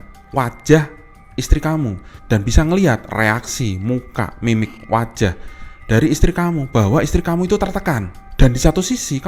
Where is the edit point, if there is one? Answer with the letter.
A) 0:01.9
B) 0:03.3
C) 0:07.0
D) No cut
D